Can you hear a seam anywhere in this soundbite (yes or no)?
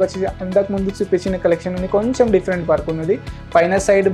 no